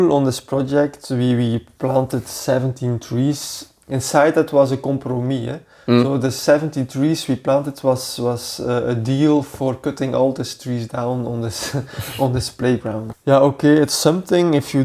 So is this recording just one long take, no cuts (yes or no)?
no